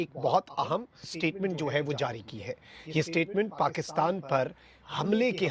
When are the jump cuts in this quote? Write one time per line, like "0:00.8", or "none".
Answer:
0:01.1